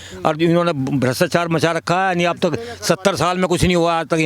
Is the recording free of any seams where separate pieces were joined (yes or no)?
yes